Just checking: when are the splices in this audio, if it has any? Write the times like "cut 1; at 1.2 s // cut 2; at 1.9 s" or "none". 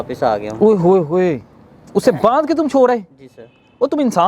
none